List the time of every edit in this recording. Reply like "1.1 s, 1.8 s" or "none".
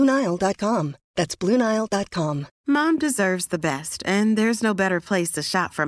2.5 s